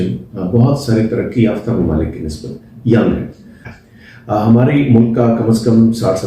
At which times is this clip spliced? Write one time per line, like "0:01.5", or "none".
0:03.7

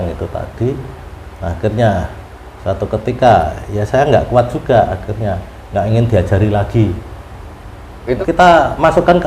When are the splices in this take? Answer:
0:08.2

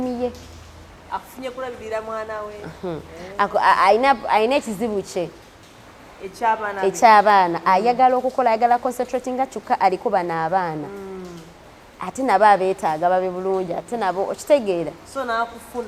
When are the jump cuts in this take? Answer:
none

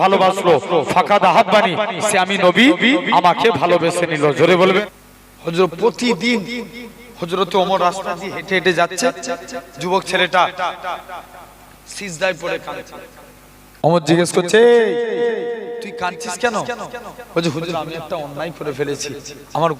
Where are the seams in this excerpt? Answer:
0:04.8

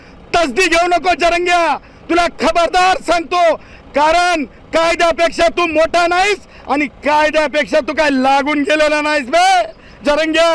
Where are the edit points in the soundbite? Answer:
none

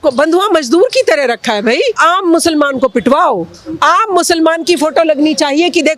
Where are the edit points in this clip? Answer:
0:02.0

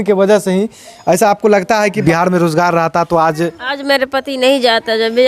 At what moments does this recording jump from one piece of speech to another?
0:02.0

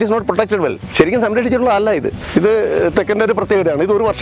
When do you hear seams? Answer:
0:00.8
0:02.2

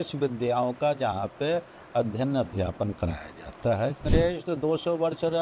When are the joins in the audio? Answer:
0:04.0

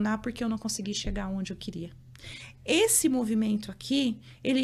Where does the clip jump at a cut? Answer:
none

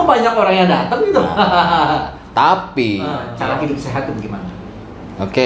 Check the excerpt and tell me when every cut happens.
0:03.3

